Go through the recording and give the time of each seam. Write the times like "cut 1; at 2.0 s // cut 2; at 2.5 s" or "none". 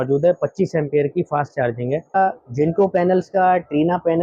cut 1; at 2.2 s